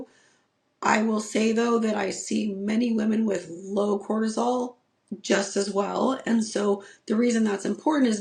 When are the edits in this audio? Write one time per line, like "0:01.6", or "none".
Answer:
none